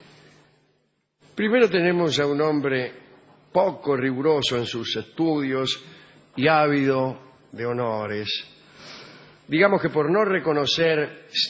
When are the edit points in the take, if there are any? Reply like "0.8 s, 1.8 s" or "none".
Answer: 7.4 s

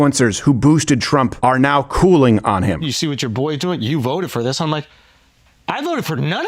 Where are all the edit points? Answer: 1.3 s, 2.8 s

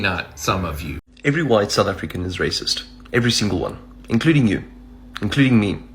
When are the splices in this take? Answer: 1.0 s

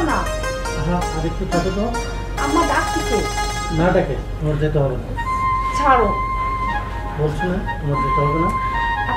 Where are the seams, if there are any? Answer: none

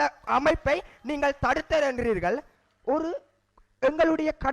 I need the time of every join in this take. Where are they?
none

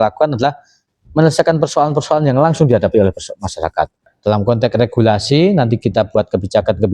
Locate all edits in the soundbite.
4.1 s

